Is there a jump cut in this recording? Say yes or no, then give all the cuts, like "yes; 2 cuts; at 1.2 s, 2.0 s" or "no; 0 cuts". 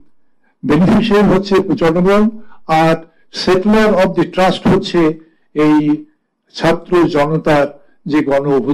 no; 0 cuts